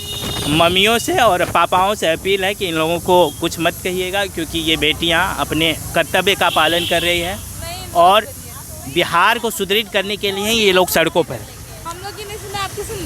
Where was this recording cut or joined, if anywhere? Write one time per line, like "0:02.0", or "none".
none

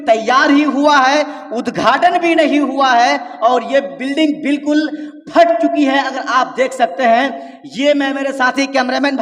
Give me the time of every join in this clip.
none

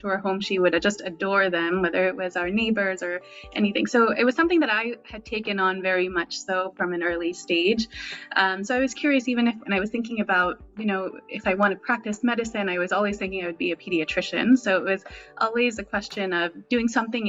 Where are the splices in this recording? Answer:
none

